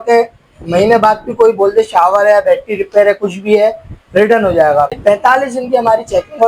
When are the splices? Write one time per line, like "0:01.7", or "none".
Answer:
0:05.0